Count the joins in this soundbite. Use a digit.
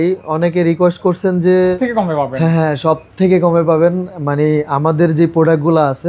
1